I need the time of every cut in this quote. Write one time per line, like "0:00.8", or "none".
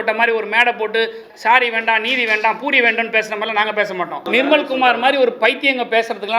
0:01.3
0:04.2